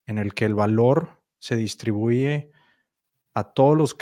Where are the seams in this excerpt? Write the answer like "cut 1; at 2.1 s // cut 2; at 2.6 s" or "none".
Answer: none